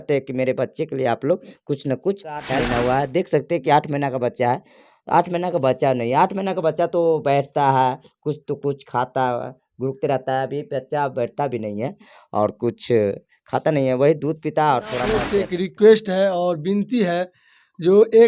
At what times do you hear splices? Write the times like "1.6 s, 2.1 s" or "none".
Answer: 2.5 s, 15.3 s